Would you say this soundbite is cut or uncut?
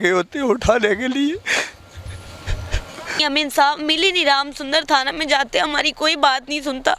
cut